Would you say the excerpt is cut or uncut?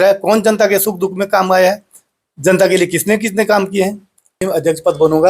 cut